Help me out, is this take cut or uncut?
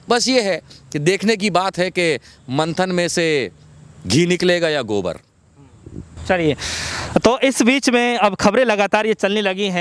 uncut